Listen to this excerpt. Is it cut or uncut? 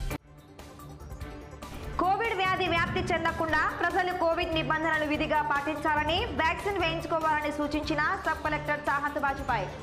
uncut